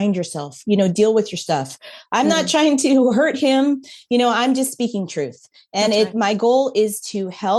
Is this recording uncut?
yes; 0 cuts

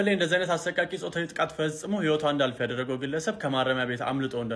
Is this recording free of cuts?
yes; 0 cuts

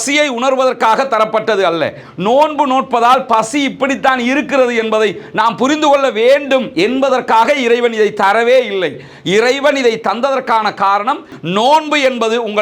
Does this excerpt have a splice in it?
yes; 1 cut; at 11.3 s

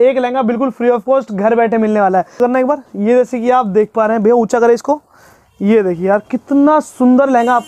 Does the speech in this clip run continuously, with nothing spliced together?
yes; 0 cuts

